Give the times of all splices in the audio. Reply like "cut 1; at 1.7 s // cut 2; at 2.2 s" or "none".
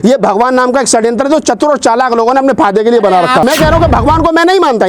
cut 1; at 3.4 s